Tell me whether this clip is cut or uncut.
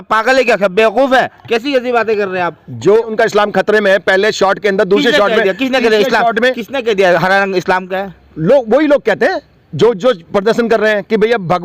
cut